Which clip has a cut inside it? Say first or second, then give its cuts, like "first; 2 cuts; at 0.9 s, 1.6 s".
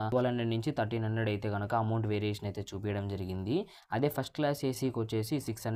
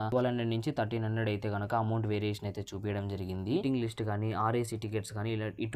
second; 1 cut; at 3.6 s